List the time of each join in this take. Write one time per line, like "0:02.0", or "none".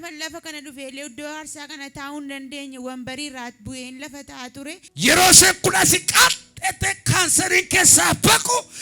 0:04.9